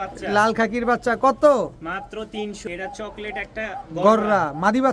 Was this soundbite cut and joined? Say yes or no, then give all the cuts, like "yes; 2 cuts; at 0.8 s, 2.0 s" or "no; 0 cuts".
yes; 1 cut; at 2.7 s